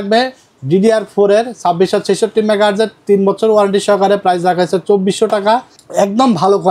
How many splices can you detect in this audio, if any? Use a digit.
1